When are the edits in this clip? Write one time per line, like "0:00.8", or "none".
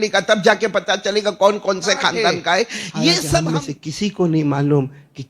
0:03.4